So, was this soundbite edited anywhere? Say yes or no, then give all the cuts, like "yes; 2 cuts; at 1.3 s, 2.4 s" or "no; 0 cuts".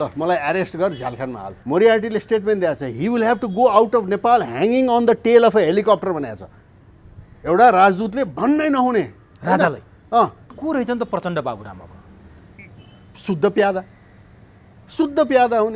yes; 2 cuts; at 1.5 s, 10.5 s